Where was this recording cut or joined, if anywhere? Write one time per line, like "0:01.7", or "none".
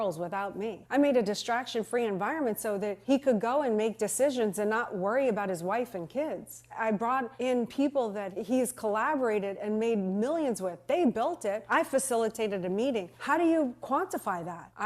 none